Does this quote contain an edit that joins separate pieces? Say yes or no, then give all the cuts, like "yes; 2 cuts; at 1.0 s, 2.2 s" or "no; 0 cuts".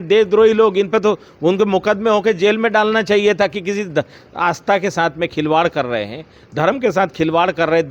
no; 0 cuts